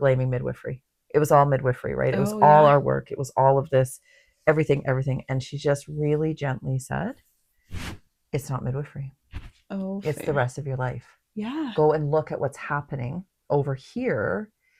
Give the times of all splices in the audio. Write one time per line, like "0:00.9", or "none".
none

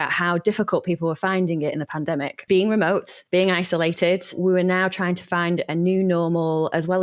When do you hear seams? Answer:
0:02.5
0:03.1
0:04.4

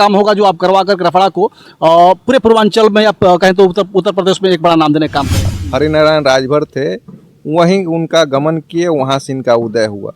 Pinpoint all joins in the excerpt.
0:05.5

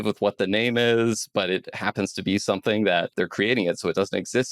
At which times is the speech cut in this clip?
0:03.1

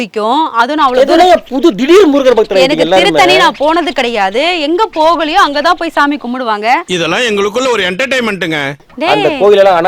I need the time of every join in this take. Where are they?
0:08.8

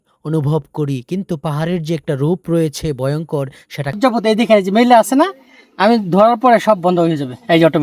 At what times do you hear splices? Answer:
0:04.0

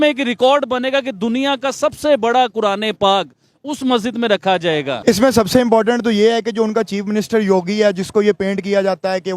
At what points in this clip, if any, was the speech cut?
0:04.9

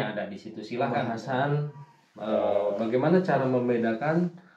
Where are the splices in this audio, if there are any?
0:01.1

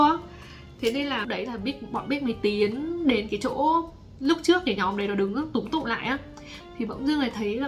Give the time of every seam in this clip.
0:01.3

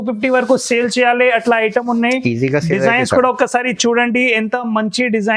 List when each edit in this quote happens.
none

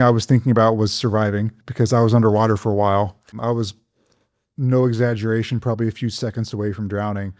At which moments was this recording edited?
0:01.6
0:03.3

